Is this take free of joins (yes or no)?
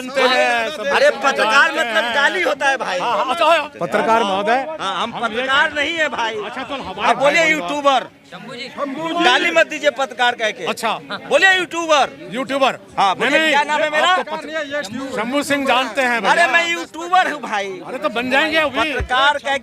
no